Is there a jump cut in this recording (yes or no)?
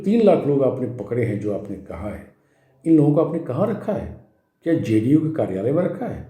no